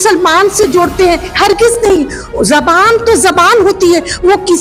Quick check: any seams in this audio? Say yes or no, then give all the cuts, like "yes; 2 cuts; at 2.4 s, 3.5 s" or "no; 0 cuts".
no; 0 cuts